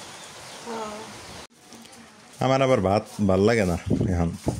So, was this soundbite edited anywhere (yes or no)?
yes